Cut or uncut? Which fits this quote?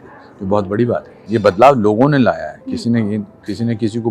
cut